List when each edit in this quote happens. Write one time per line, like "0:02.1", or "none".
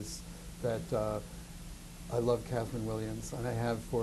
0:03.1